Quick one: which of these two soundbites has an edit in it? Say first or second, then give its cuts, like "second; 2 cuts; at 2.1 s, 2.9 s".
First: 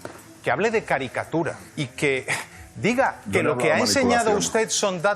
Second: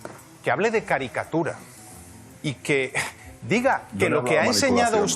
first; 1 cut; at 1.6 s